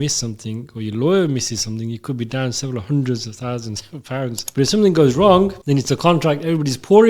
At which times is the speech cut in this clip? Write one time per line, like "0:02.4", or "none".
0:04.4
0:05.6